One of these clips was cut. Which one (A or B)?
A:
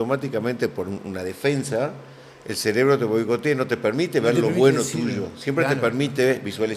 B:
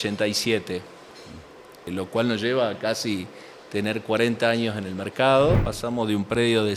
B